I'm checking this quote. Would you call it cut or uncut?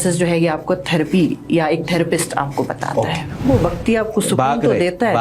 cut